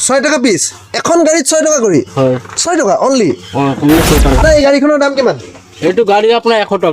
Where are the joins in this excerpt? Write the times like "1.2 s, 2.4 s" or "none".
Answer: 4.3 s